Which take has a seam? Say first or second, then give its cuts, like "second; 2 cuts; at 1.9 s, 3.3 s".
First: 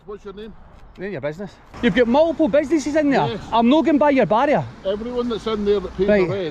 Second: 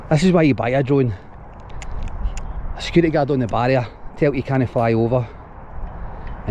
first; 1 cut; at 1.6 s